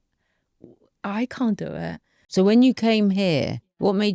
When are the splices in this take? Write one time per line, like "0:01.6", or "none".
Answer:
0:02.1